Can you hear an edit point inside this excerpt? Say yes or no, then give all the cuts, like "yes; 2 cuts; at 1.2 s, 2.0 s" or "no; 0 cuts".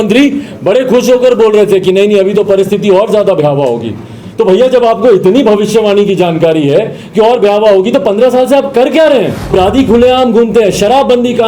yes; 1 cut; at 9.4 s